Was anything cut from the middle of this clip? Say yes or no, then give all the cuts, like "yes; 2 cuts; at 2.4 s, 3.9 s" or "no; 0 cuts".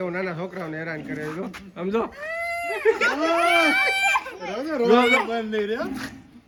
no; 0 cuts